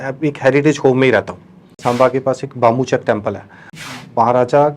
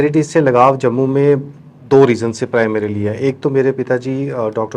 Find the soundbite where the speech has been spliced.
first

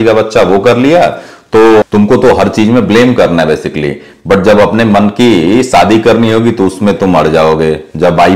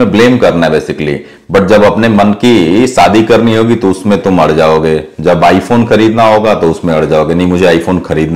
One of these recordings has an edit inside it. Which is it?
first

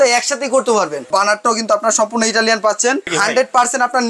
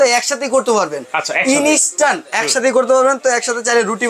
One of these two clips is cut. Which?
first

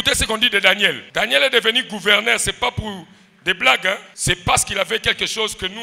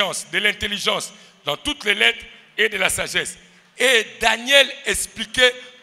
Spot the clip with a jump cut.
first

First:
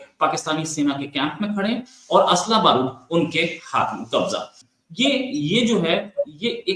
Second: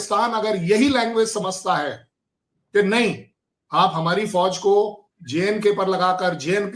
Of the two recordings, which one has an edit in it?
first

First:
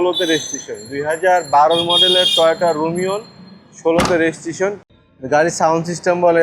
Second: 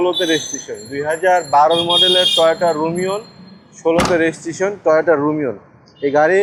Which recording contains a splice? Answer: first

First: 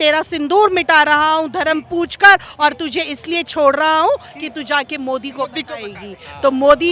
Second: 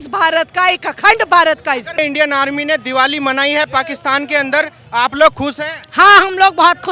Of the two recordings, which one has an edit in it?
second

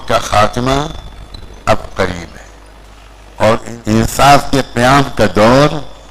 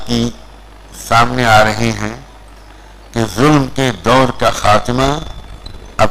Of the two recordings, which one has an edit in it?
first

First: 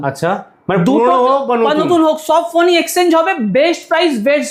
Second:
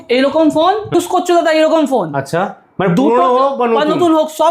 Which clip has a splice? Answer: second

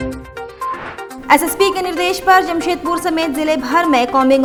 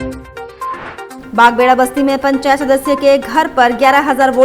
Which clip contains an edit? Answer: second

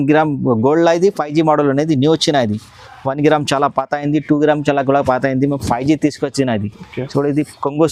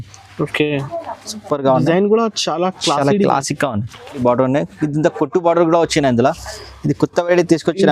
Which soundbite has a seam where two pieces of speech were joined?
second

